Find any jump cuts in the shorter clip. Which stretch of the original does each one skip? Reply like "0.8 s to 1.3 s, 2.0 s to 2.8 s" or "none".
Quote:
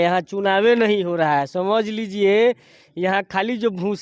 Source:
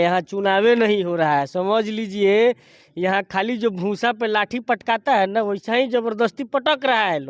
none